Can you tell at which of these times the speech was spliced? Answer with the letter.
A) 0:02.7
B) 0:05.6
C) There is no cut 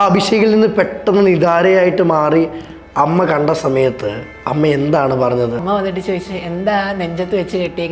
B